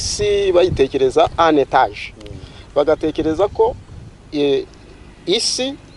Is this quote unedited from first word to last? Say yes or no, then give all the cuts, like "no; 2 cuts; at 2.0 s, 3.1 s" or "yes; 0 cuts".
yes; 0 cuts